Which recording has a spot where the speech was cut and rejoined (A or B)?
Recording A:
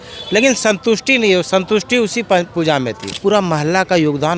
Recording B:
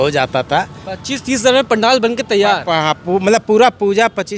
A